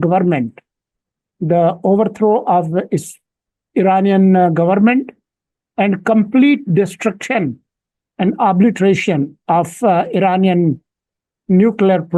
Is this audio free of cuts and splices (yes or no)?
yes